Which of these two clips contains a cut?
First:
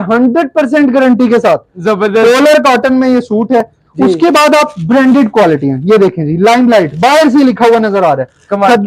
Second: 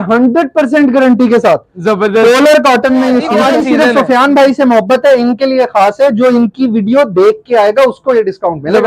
second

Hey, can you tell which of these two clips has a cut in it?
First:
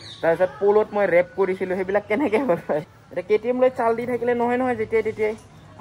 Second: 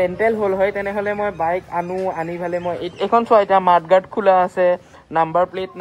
first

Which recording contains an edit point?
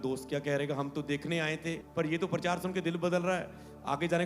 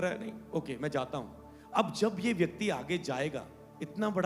first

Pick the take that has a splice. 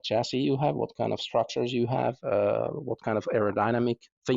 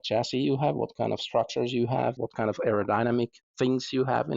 second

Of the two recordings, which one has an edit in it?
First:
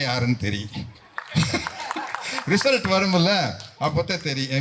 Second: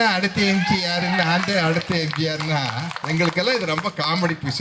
second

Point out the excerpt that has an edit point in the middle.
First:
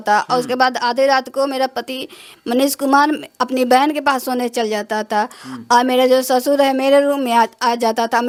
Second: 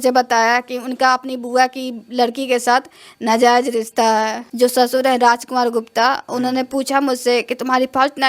second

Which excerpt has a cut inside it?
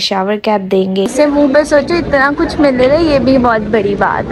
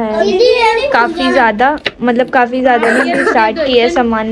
first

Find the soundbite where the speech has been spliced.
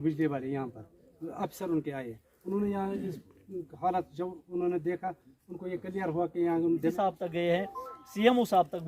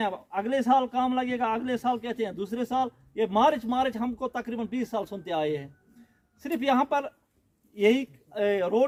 first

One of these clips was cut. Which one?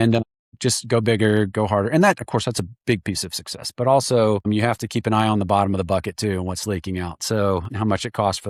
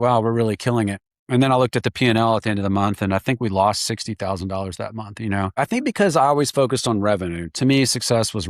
second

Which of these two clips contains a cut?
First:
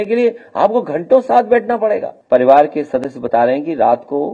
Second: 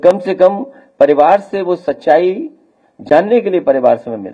first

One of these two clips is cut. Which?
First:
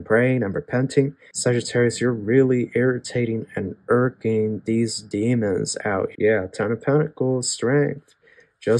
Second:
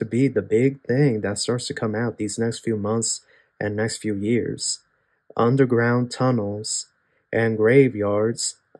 first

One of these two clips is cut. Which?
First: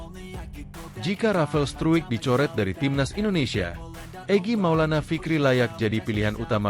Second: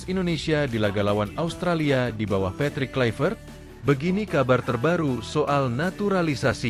first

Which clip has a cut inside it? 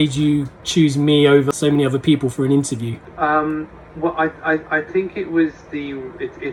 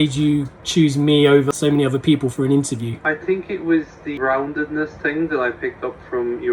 second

